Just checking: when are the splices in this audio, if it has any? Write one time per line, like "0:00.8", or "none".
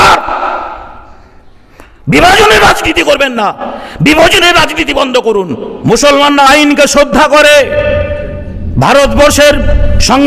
0:05.7